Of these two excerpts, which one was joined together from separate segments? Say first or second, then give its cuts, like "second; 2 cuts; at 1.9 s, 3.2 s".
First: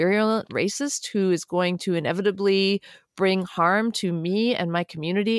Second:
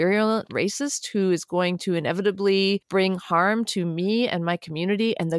second; 1 cut; at 2.8 s